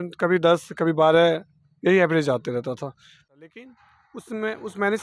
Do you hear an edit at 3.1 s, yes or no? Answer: yes